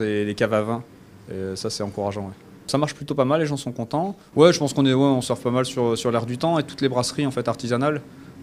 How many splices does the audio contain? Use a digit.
0